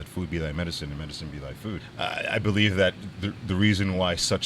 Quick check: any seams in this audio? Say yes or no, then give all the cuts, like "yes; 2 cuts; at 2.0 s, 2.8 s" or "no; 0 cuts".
yes; 1 cut; at 1.8 s